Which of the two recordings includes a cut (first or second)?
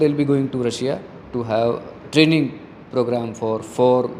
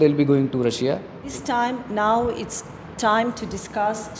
second